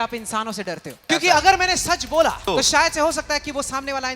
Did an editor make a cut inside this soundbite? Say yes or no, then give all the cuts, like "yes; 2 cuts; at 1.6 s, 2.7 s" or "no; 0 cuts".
yes; 2 cuts; at 1.0 s, 2.4 s